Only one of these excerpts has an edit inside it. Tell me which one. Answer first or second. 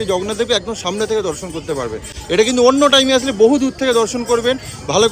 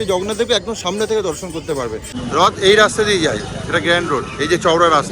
second